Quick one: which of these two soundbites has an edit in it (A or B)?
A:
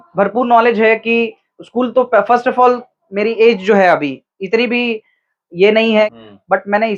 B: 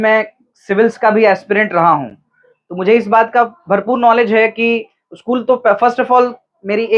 A